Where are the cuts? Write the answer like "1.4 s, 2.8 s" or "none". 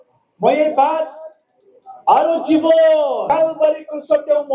3.2 s